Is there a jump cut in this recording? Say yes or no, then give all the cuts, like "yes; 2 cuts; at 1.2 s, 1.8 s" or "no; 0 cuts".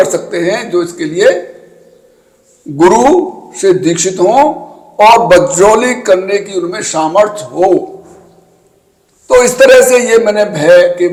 no; 0 cuts